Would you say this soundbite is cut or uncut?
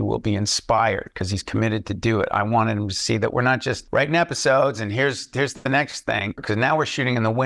cut